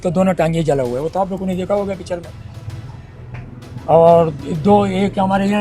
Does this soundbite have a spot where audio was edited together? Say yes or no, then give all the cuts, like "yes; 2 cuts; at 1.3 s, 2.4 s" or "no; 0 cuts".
no; 0 cuts